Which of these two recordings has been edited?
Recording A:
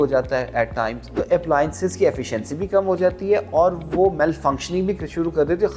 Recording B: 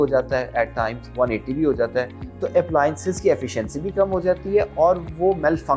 A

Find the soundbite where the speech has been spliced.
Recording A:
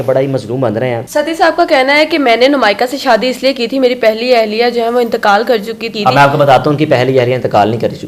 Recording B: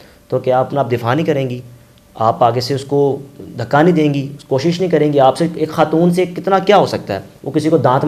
A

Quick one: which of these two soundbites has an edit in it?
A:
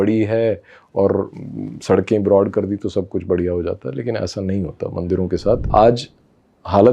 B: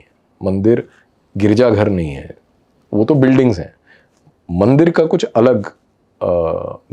A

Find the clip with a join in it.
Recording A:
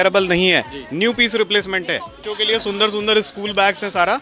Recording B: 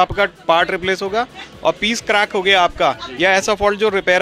A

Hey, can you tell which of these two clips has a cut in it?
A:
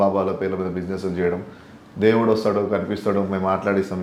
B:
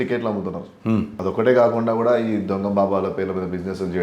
B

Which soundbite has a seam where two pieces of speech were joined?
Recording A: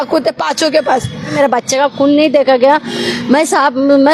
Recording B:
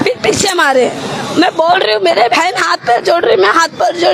A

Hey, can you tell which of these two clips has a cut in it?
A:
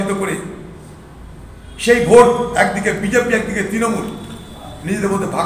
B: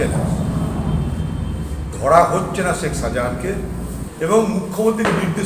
B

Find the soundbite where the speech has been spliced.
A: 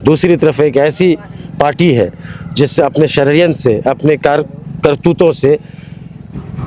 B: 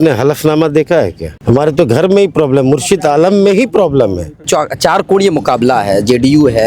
B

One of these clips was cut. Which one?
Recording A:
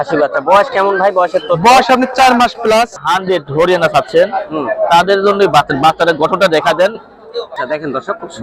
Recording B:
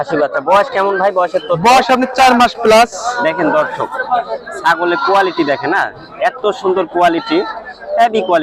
A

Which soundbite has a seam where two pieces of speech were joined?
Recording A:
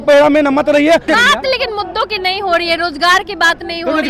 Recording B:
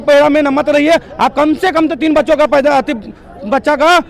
A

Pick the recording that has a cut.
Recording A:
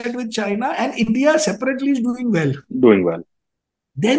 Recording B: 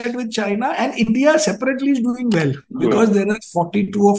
B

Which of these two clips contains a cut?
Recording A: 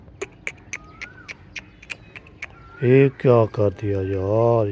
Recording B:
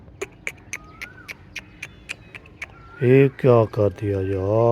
A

